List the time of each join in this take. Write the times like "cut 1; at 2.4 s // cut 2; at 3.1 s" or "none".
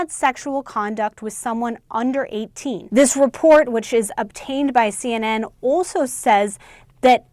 cut 1; at 2.8 s